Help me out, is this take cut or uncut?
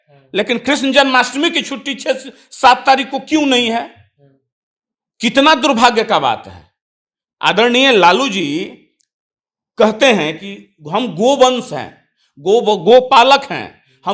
uncut